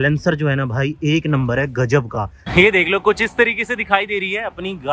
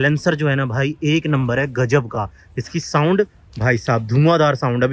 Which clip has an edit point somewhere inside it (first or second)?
first